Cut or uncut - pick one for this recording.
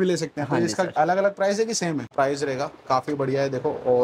cut